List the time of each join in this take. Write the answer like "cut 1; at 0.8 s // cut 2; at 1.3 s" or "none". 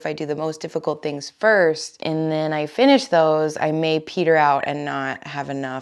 cut 1; at 1.9 s